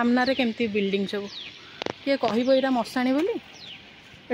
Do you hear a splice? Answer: no; 0 cuts

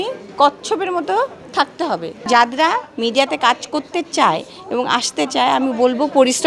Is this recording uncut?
no; 1 cut; at 2.3 s

